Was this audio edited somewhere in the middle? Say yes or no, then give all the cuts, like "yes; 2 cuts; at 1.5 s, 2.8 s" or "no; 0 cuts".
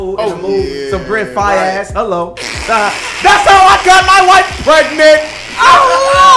no; 0 cuts